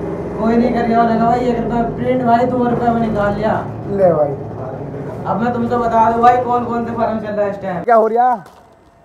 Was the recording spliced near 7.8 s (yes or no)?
yes